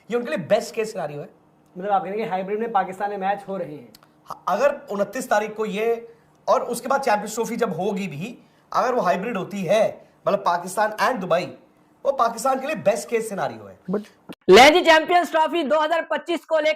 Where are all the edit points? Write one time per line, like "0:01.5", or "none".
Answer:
0:14.2